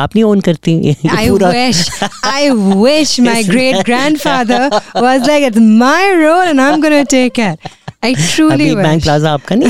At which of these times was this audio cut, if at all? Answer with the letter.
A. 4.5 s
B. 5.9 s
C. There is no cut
C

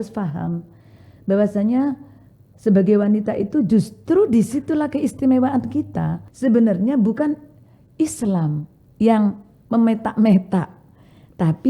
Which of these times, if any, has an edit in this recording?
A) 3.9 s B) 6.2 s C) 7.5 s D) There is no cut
B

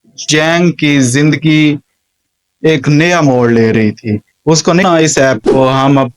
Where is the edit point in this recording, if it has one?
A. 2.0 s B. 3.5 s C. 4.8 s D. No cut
C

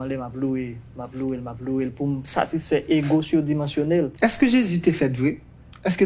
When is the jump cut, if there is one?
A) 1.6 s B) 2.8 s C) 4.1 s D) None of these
C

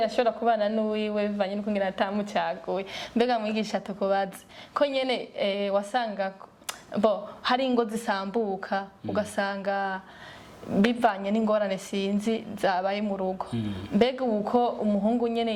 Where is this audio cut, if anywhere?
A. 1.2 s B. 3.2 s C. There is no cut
C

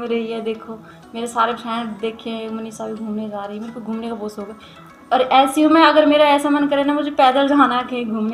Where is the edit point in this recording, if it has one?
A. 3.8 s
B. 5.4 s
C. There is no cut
C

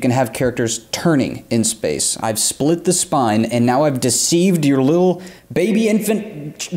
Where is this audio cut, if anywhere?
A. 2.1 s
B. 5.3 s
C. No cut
A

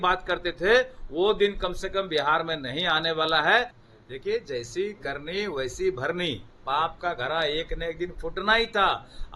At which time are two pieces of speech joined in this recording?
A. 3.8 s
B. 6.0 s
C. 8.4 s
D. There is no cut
A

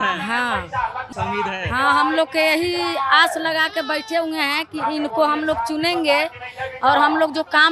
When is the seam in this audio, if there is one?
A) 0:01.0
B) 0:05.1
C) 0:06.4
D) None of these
A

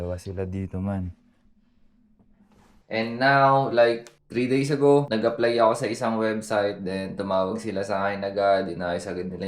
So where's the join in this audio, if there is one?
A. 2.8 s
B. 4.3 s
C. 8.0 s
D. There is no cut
A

